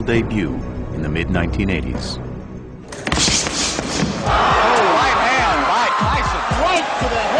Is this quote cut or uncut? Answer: cut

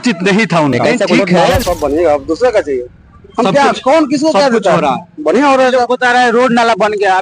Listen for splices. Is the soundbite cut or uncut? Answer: cut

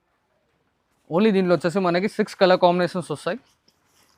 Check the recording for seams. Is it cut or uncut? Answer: uncut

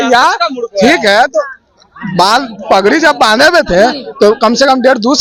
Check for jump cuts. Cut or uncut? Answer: uncut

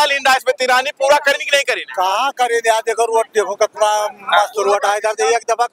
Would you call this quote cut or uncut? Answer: uncut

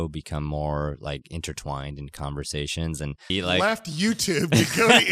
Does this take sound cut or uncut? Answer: cut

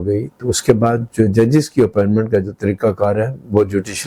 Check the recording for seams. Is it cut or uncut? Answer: uncut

